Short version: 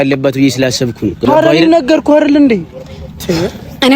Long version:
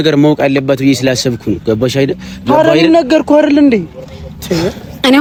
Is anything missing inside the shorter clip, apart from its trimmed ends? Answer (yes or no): yes